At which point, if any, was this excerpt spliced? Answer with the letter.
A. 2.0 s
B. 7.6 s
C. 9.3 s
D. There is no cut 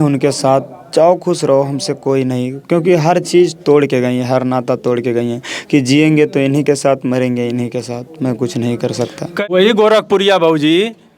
C